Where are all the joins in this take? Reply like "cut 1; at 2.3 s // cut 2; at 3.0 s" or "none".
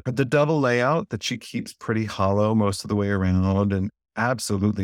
none